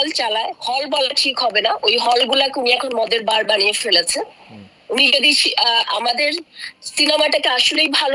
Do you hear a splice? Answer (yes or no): no